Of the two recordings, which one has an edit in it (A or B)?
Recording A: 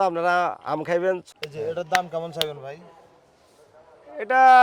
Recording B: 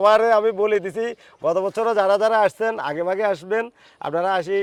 A